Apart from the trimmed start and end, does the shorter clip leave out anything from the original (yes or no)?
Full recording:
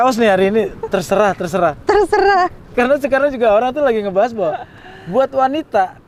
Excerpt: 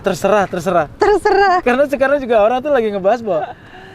yes